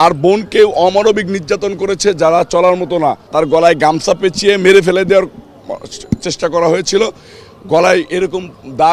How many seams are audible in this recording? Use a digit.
1